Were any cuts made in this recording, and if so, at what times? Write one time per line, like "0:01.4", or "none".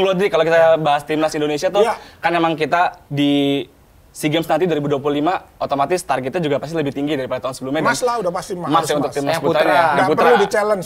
none